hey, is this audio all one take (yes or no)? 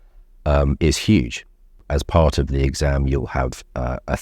yes